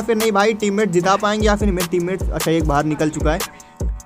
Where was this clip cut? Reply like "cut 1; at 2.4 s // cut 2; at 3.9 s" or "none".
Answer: none